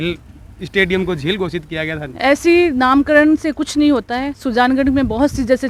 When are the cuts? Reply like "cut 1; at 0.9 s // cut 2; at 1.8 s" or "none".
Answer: none